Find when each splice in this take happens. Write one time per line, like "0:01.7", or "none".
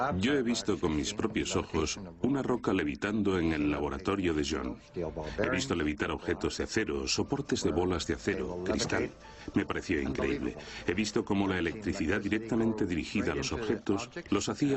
0:11.3